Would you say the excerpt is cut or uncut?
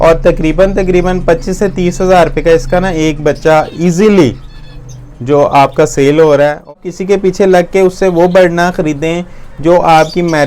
cut